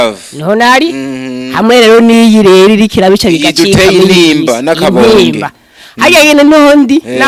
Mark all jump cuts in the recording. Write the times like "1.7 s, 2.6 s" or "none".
none